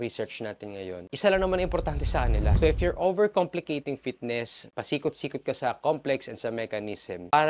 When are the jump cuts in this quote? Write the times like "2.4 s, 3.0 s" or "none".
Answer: 2.5 s